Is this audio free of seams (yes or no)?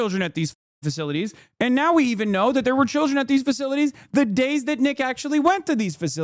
yes